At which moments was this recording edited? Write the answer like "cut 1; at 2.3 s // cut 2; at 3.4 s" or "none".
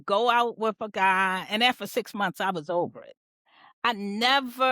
cut 1; at 3.3 s